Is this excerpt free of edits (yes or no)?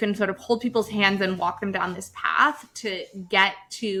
yes